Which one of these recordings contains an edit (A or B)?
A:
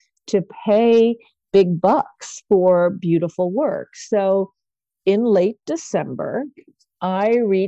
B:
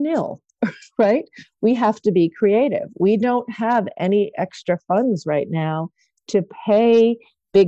B